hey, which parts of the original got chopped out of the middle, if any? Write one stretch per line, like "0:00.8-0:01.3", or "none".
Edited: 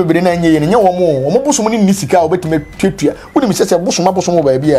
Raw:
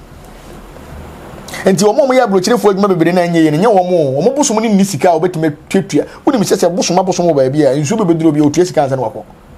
none